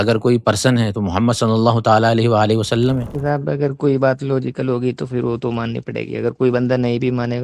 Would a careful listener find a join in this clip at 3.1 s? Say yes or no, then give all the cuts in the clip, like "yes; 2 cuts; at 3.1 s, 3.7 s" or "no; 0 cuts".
yes; 1 cut; at 3.1 s